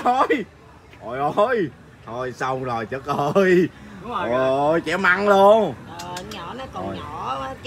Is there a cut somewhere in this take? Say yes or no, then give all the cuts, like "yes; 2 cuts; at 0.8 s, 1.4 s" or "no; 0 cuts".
no; 0 cuts